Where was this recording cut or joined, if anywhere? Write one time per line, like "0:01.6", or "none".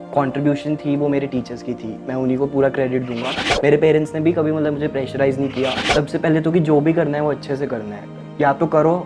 0:03.4
0:05.8